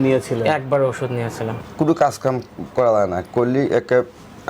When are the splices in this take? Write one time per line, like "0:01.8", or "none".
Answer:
0:01.5

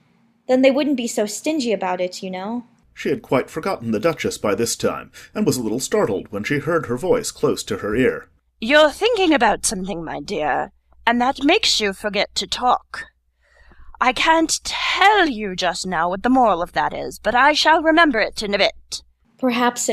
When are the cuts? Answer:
0:01.4

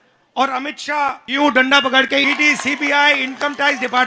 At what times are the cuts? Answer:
0:01.2
0:02.2

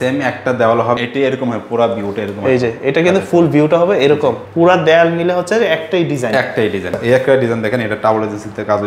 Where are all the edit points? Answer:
0:01.0
0:04.4
0:07.0

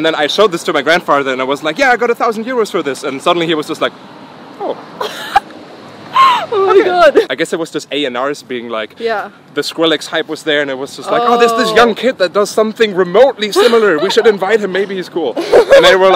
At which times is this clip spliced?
0:07.3

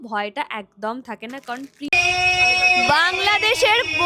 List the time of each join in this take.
0:01.9

